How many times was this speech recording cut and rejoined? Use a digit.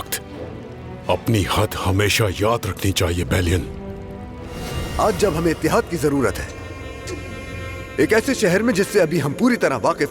1